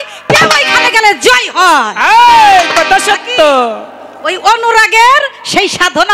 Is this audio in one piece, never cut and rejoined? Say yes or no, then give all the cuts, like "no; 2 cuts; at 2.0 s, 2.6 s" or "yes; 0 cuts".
yes; 0 cuts